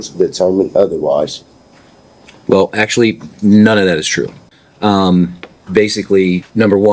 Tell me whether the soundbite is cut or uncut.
uncut